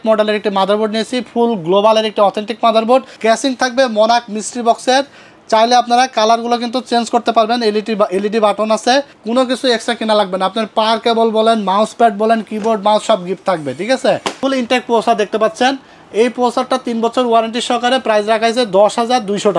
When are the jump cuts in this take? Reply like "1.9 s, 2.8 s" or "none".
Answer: 3.1 s, 9.2 s, 14.4 s